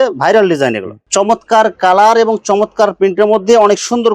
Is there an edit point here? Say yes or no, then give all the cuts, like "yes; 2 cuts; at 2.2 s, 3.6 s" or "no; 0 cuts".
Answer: yes; 1 cut; at 0.9 s